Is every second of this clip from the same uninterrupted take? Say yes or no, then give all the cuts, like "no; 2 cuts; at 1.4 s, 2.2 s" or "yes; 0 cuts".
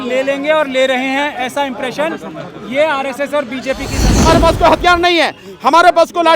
no; 1 cut; at 4.2 s